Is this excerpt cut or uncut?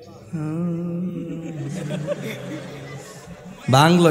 uncut